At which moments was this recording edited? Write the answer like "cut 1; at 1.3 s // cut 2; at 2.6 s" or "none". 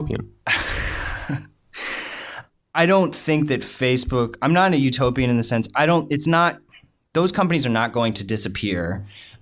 cut 1; at 2.4 s